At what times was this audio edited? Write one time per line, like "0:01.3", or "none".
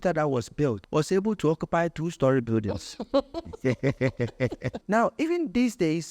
0:00.8
0:04.8